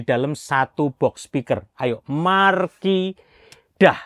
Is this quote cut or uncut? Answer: uncut